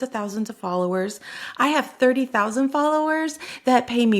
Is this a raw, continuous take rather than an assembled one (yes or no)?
yes